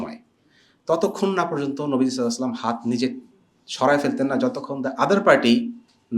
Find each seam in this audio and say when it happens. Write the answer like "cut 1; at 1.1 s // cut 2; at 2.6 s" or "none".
none